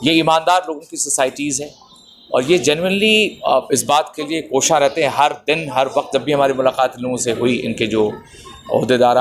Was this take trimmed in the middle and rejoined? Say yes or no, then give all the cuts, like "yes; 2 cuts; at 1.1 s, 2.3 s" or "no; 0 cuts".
no; 0 cuts